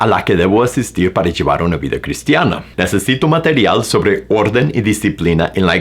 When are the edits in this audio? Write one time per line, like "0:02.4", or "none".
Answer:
0:02.6